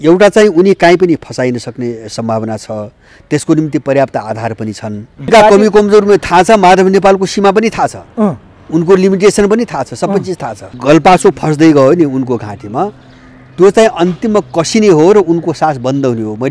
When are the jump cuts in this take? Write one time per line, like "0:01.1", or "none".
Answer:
0:05.3
0:10.8